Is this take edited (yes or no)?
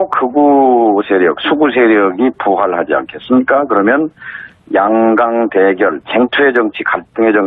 yes